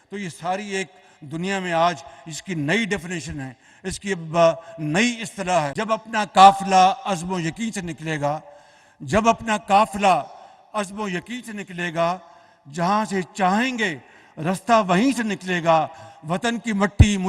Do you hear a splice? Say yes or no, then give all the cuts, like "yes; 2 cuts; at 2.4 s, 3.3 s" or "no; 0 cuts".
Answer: yes; 1 cut; at 5.7 s